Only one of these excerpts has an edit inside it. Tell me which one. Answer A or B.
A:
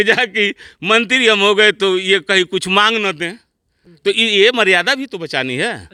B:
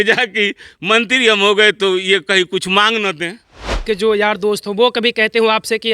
B